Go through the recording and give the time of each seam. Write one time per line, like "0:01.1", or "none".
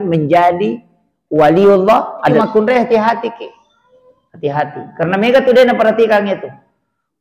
0:02.4